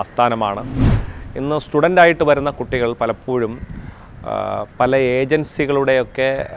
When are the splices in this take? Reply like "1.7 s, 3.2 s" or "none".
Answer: 1.0 s